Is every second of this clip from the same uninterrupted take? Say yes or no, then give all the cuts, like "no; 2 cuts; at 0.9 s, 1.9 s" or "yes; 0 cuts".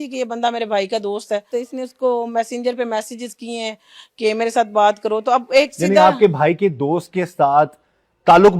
no; 1 cut; at 1.5 s